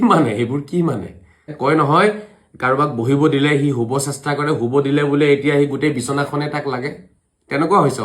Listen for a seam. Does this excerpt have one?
yes; 1 cut; at 1.5 s

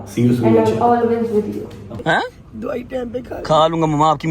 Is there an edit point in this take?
yes; 1 cut; at 1.8 s

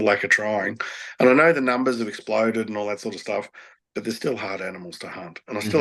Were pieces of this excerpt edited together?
no; 0 cuts

